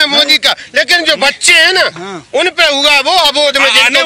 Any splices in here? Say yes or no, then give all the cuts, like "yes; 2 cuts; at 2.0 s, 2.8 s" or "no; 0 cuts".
no; 0 cuts